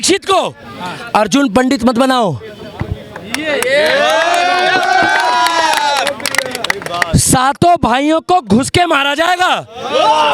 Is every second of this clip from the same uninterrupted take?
yes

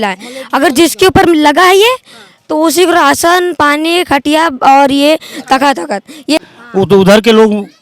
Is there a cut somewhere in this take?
yes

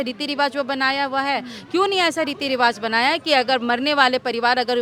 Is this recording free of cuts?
yes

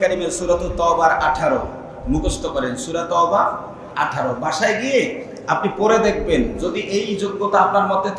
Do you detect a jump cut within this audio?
yes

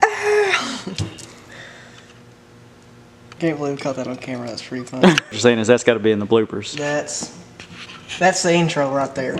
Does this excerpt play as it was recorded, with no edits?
no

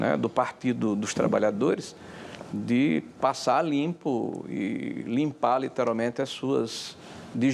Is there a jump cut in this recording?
no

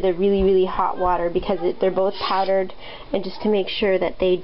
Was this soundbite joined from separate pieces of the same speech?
yes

